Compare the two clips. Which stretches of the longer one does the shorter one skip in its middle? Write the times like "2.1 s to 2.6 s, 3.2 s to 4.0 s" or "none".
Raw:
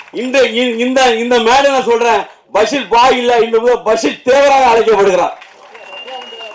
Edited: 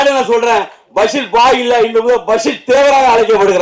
none